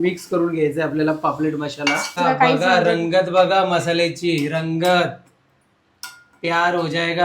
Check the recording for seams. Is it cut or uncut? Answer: cut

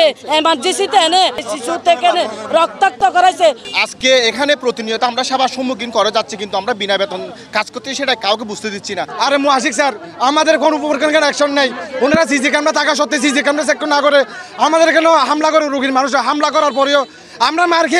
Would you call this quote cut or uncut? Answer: cut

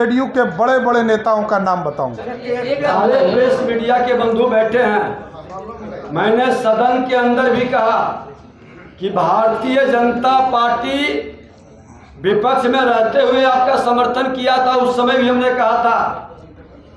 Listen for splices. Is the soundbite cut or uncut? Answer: uncut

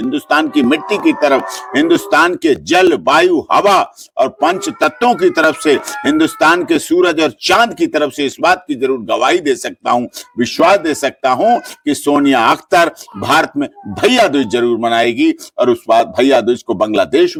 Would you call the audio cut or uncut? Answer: uncut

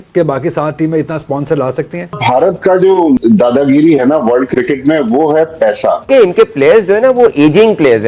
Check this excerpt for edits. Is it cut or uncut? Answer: cut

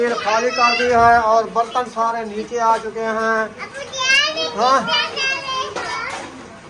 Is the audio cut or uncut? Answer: uncut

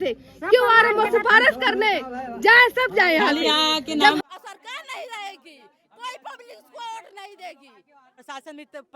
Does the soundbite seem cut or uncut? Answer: cut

